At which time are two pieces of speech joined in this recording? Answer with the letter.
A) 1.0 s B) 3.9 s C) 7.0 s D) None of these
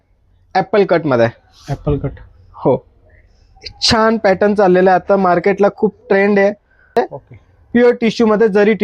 C